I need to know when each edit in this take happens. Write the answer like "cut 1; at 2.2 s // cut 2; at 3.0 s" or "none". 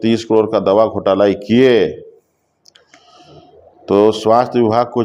none